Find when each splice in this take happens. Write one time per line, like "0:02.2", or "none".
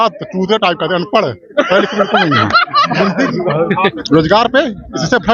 0:03.9